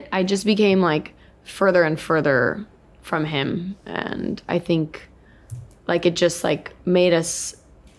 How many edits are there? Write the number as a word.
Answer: zero